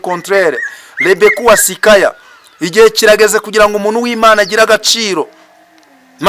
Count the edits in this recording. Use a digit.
0